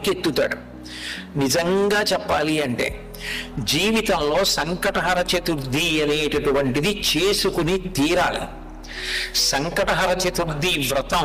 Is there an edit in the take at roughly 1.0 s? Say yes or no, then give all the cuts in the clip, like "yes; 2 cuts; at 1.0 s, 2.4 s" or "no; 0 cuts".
no; 0 cuts